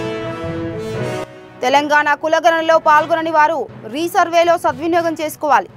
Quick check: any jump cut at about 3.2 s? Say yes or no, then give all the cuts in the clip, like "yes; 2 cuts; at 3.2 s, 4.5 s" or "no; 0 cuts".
no; 1 cut; at 1.1 s